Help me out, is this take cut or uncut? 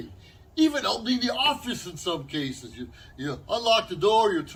uncut